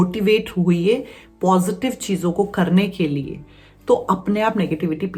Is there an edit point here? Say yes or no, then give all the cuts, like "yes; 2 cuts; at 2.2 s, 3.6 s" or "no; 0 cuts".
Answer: no; 0 cuts